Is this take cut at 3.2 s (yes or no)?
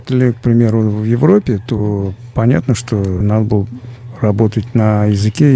yes